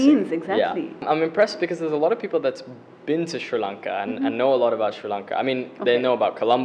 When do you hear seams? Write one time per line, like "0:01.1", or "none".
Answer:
0:01.0